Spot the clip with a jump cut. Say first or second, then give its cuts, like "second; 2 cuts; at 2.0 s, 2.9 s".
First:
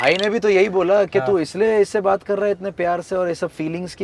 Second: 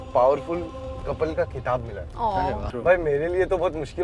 second; 1 cut; at 2.6 s